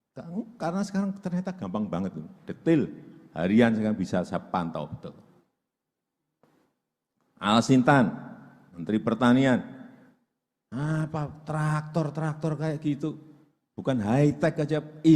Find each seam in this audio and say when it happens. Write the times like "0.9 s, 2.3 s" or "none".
none